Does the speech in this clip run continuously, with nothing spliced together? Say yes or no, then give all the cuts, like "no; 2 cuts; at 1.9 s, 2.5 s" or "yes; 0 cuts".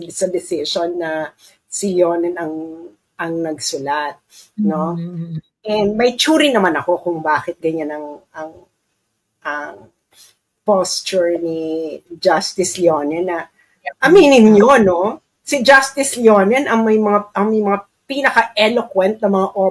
yes; 0 cuts